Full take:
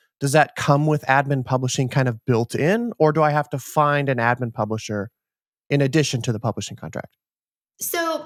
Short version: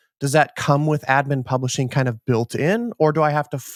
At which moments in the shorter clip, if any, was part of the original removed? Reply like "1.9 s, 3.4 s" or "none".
none